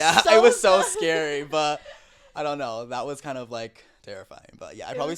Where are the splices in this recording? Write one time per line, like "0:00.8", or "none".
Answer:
none